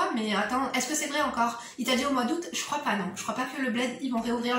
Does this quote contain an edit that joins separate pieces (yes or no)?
no